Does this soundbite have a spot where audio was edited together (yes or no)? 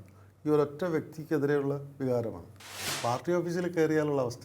yes